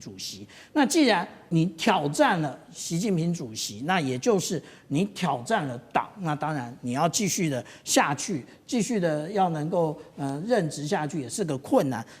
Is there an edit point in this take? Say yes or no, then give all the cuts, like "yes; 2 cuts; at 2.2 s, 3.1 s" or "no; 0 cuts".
yes; 1 cut; at 1.5 s